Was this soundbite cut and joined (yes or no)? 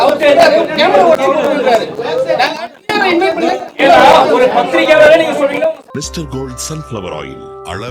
yes